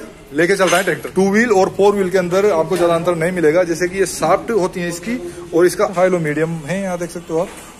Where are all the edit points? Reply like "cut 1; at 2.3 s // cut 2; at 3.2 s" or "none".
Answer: cut 1; at 1.0 s // cut 2; at 5.9 s